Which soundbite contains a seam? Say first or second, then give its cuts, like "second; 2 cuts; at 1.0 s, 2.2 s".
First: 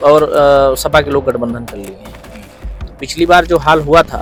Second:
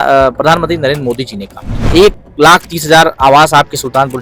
second; 1 cut; at 1.9 s